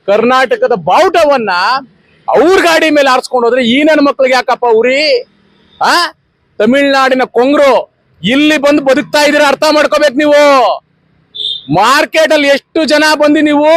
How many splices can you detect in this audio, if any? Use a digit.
0